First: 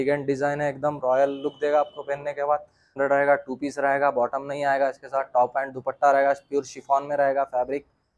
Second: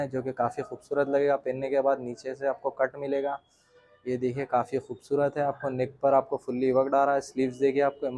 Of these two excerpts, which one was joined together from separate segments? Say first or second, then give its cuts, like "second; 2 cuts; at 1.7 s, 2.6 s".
first; 1 cut; at 2.8 s